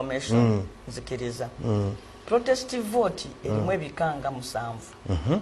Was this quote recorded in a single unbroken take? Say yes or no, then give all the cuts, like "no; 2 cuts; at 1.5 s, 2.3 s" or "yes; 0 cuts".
yes; 0 cuts